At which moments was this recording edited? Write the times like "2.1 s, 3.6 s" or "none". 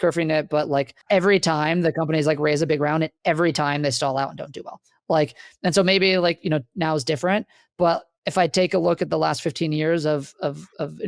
1.0 s